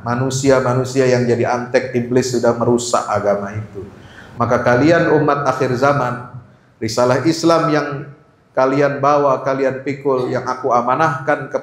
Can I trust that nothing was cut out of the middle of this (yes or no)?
yes